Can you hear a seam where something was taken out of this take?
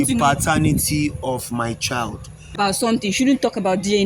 yes; 1 cut; at 2.5 s

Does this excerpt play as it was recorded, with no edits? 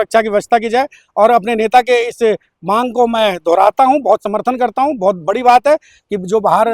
yes; 0 cuts

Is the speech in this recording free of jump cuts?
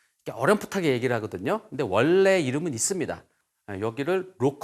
no; 1 cut; at 3.3 s

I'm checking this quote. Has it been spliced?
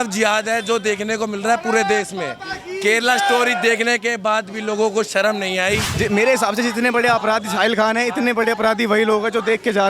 yes; 1 cut; at 5.9 s

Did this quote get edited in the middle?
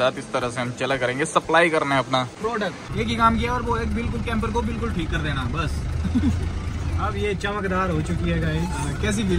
yes; 1 cut; at 2.4 s

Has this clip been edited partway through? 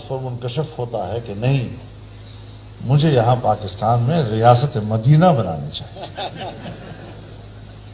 no; 0 cuts

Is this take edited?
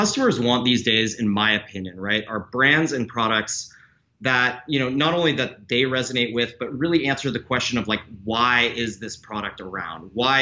no; 0 cuts

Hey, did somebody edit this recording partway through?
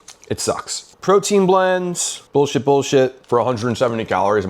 yes; 1 cut; at 3.2 s

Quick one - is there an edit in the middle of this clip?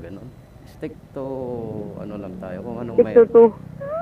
no; 0 cuts

